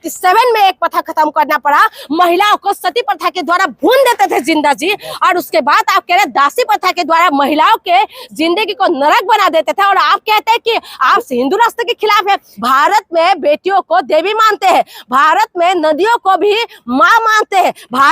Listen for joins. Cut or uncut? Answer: cut